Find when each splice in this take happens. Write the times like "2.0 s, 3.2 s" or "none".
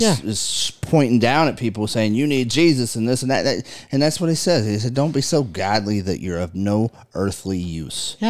none